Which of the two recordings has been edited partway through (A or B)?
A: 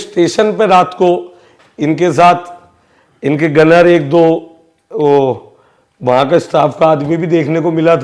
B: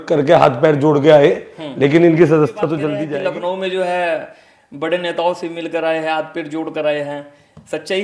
B